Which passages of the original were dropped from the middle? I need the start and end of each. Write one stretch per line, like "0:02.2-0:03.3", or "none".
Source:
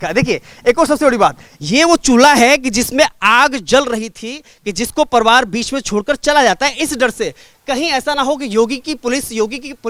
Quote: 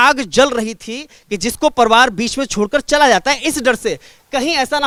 none